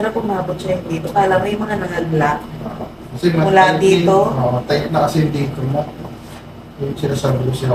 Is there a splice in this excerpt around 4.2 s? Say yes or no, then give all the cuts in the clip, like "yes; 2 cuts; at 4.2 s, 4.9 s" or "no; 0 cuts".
no; 0 cuts